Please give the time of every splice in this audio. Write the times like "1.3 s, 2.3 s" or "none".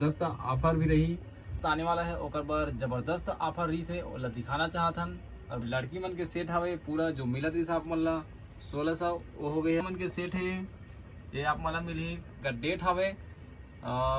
1.6 s, 5.6 s, 9.8 s, 12.4 s